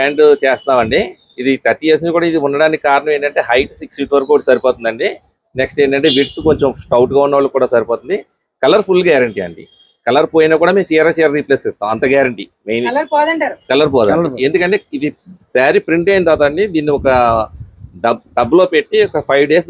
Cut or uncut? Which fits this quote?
uncut